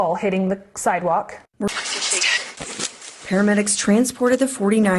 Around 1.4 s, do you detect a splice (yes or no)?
yes